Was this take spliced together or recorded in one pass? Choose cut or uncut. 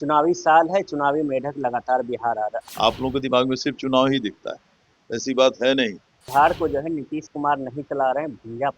cut